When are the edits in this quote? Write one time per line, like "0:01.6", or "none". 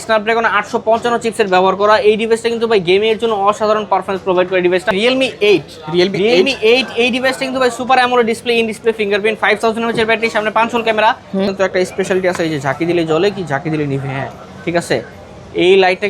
0:04.9
0:11.5